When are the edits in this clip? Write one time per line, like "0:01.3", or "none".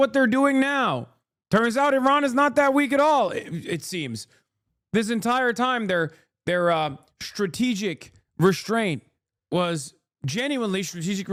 none

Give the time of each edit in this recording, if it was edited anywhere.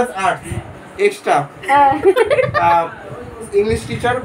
none

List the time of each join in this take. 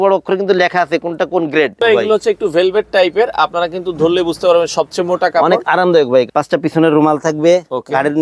0:01.8
0:06.3

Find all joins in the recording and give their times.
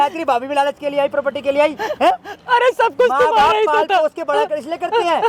none

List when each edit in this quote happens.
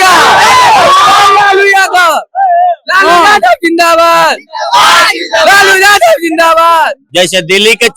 0:07.0

